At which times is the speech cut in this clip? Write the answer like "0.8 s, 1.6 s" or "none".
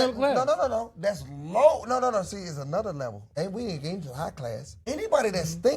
3.2 s, 4.7 s